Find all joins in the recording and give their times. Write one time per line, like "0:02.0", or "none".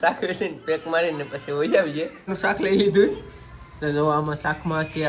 0:02.3